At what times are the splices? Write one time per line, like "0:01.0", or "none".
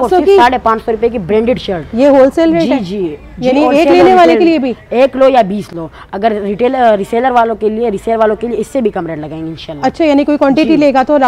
none